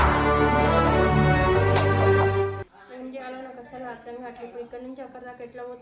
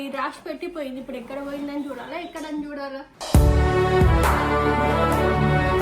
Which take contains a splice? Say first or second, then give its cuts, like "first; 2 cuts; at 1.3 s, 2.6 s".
first; 1 cut; at 2.7 s